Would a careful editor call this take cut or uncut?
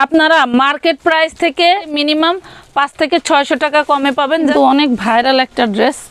cut